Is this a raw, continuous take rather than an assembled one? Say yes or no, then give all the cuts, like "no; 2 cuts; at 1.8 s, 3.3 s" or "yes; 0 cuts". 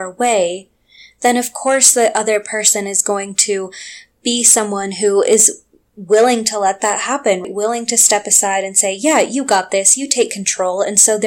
no; 1 cut; at 7.5 s